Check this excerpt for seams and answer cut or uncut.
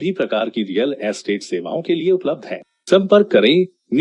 uncut